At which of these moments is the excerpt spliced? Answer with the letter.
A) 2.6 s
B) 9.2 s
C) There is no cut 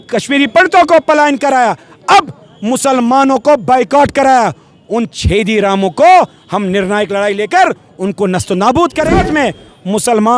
B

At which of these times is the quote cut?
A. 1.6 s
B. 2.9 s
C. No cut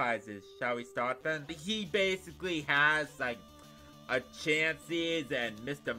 A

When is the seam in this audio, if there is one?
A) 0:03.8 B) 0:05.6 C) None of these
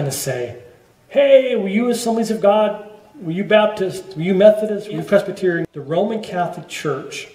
B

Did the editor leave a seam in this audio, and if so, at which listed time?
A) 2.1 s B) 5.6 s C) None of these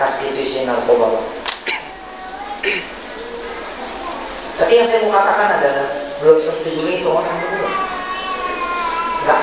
C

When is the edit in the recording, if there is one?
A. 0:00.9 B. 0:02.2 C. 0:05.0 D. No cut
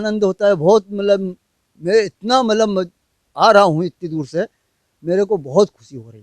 D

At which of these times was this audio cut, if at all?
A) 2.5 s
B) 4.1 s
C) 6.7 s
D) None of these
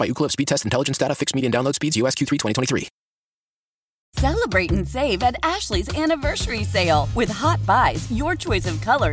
B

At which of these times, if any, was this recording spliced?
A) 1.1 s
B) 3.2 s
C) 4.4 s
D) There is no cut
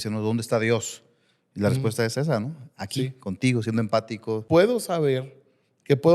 C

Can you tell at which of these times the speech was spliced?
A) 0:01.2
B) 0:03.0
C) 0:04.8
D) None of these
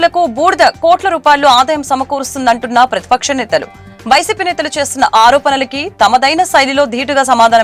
D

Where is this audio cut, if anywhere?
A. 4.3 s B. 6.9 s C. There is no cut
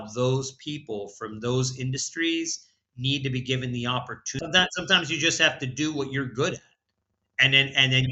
A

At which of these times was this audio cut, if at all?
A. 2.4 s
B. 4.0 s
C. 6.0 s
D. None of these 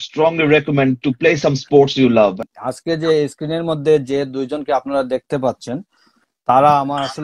A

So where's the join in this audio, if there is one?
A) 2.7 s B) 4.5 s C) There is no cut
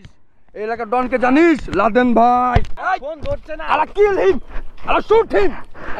A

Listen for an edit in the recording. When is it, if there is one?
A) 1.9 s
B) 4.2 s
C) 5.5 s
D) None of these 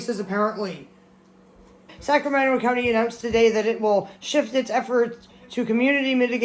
A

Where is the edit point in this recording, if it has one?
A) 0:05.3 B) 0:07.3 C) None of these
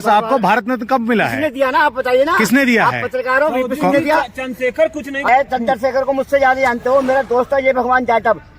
A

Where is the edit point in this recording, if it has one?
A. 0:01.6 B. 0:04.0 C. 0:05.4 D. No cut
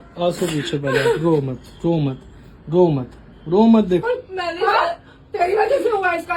B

